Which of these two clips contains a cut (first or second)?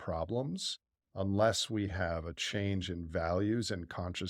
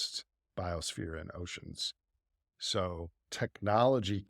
second